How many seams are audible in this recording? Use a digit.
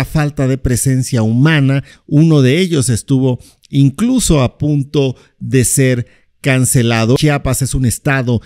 1